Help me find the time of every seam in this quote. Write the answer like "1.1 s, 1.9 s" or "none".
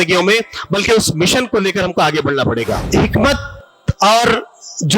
2.8 s

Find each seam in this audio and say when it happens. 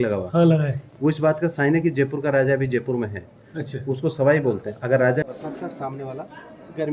5.2 s

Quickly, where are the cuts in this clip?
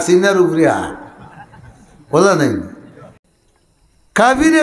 3.3 s

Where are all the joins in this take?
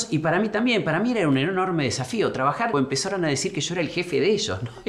2.7 s

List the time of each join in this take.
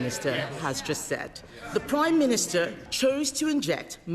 1.7 s

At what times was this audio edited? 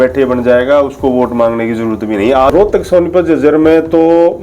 2.5 s

